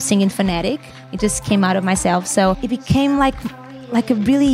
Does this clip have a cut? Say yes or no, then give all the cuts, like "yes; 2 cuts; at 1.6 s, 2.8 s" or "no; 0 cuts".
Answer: yes; 1 cut; at 2.6 s